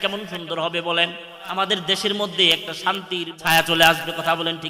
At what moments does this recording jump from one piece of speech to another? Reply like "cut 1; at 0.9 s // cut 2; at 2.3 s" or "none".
cut 1; at 1.4 s // cut 2; at 3.3 s

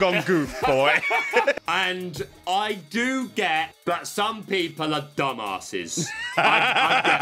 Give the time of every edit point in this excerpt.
cut 1; at 1.5 s // cut 2; at 3.7 s

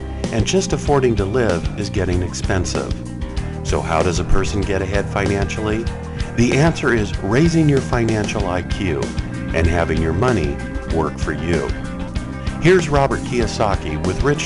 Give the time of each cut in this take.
cut 1; at 3.1 s

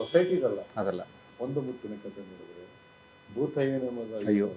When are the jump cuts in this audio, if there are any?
cut 1; at 1.3 s

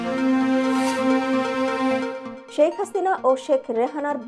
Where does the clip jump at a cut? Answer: cut 1; at 2.3 s

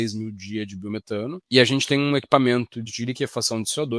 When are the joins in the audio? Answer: cut 1; at 1.4 s // cut 2; at 2.9 s

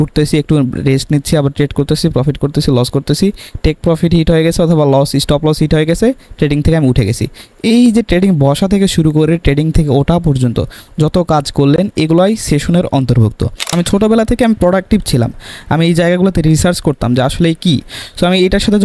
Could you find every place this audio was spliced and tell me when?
cut 1; at 13.7 s

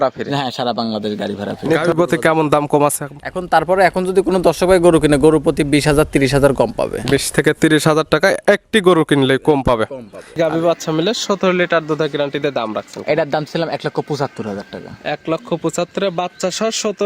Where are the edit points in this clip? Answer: cut 1; at 1.8 s // cut 2; at 10.4 s

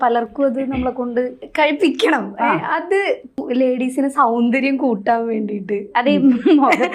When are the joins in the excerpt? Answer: cut 1; at 1.4 s // cut 2; at 3.4 s

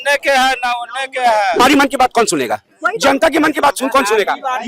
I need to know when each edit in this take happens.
cut 1; at 1.6 s

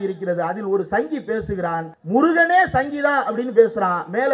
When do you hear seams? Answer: cut 1; at 1.9 s

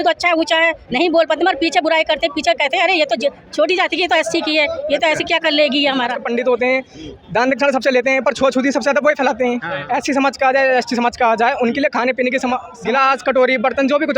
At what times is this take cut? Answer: cut 1; at 6.2 s // cut 2; at 9.7 s // cut 3; at 12.7 s

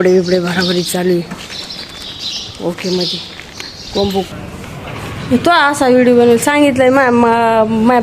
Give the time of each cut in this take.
cut 1; at 4.3 s

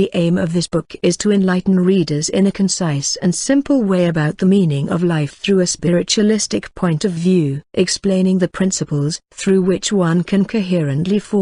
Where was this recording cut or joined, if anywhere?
none

